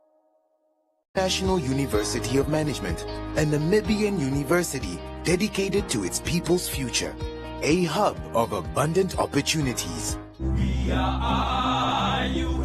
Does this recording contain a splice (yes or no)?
yes